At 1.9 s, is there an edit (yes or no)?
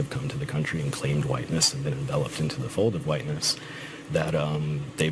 yes